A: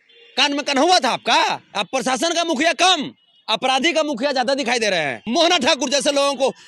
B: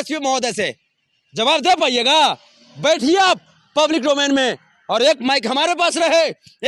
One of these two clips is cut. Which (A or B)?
A